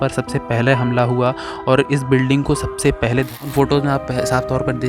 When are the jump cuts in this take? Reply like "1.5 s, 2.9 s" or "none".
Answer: 3.4 s